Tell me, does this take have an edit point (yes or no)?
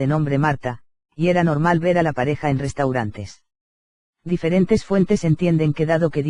no